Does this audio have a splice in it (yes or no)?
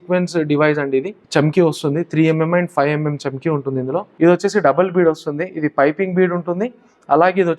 yes